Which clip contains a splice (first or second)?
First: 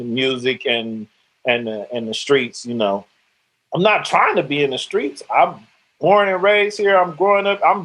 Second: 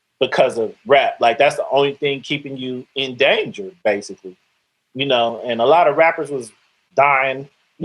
first